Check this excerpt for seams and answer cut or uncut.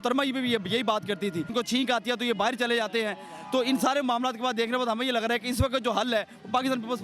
cut